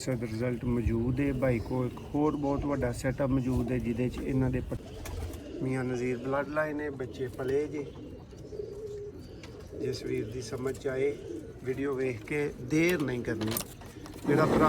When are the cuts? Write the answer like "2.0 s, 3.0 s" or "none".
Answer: 4.8 s